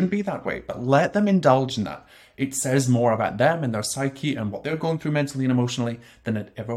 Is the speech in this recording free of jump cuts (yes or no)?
yes